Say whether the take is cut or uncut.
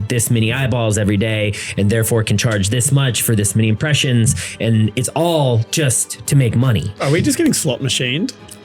uncut